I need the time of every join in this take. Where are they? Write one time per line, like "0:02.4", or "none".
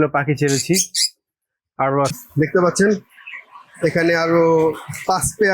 0:02.2